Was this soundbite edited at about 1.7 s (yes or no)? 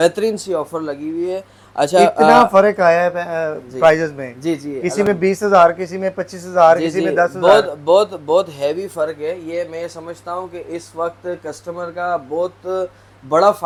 no